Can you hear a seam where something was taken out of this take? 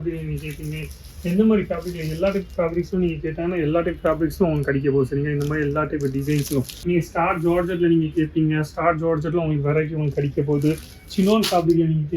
yes; 1 cut; at 6.7 s

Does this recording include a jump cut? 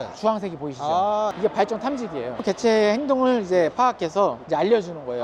no; 0 cuts

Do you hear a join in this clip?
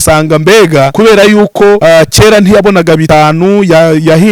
yes; 3 cuts; at 0.9 s, 1.8 s, 3.0 s

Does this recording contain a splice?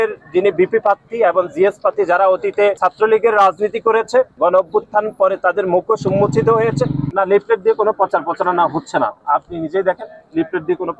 yes; 3 cuts; at 2.8 s, 4.3 s, 7.0 s

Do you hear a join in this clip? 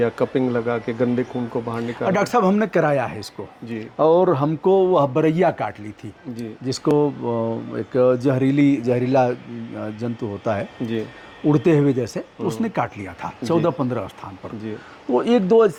no; 0 cuts

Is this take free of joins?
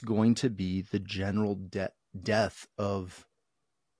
yes; 0 cuts

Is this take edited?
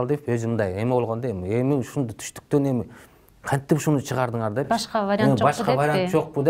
no; 0 cuts

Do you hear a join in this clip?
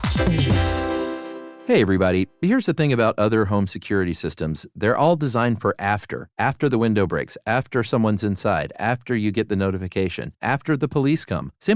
yes; 1 cut; at 1.4 s

